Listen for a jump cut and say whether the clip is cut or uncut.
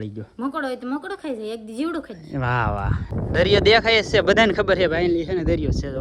cut